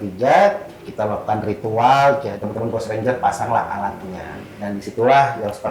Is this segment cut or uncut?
cut